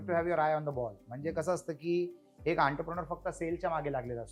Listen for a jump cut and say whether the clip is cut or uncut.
uncut